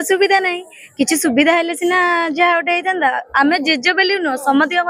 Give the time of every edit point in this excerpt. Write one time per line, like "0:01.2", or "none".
none